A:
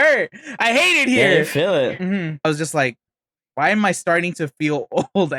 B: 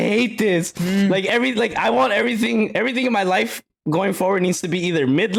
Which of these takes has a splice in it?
A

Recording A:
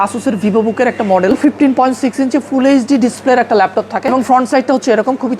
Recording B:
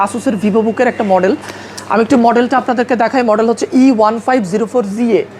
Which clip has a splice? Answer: A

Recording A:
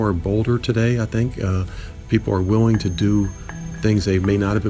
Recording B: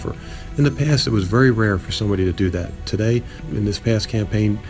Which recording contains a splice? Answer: B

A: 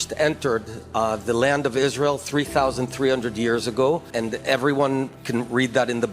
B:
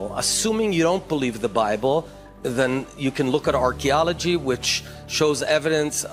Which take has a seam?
A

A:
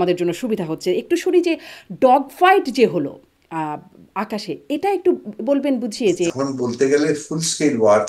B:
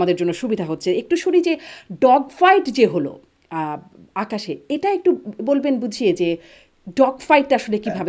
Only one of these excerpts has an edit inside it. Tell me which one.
A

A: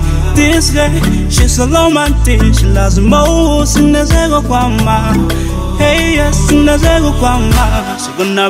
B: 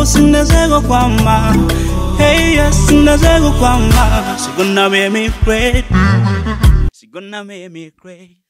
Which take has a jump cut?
B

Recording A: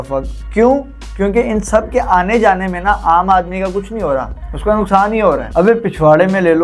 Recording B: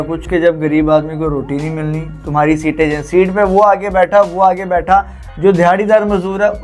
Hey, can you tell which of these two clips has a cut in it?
A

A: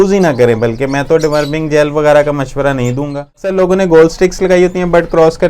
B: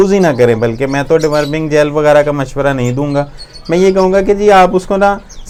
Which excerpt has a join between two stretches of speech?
A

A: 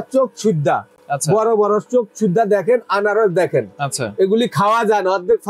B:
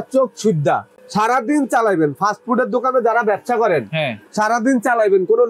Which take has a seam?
B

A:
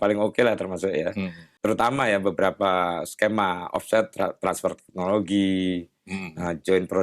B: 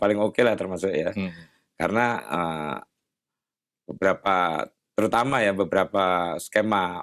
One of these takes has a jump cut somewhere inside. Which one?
A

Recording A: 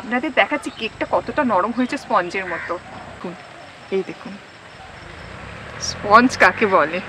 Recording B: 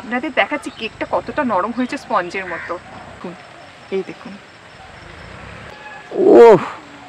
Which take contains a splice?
B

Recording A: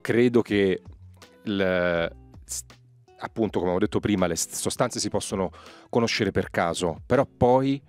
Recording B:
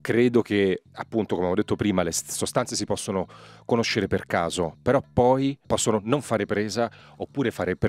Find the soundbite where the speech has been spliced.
B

